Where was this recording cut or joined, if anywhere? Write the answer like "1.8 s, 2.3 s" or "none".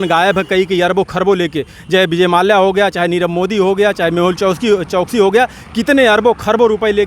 none